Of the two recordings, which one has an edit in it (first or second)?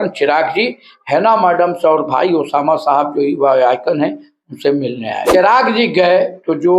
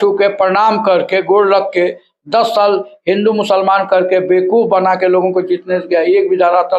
first